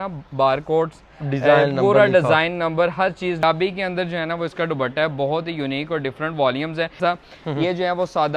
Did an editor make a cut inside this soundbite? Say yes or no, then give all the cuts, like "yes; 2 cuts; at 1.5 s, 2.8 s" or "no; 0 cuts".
yes; 2 cuts; at 3.4 s, 6.9 s